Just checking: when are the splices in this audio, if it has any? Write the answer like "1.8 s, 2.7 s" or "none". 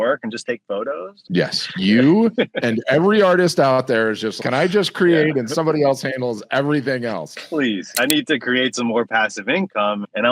8.0 s